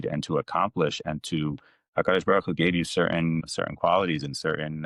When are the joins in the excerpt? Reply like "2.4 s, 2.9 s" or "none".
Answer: none